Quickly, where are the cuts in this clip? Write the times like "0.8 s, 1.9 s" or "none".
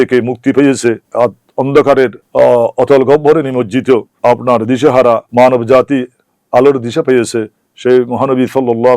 1.0 s, 2.2 s, 4.1 s, 5.2 s